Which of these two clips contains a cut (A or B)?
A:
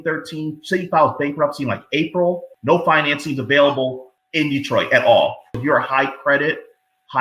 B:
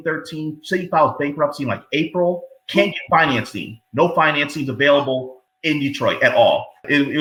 A